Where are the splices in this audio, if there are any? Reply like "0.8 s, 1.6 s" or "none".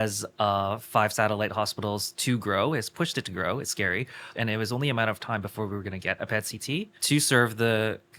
4.2 s, 7.0 s